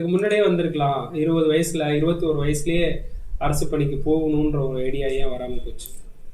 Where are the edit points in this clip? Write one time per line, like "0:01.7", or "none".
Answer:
none

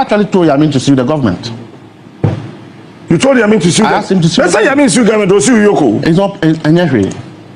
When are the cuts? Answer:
none

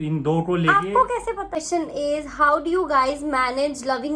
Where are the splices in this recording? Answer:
0:01.6

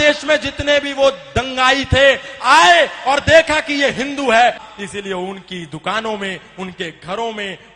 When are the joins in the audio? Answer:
0:04.6

